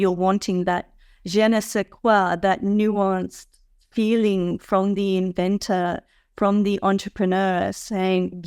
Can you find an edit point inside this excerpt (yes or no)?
no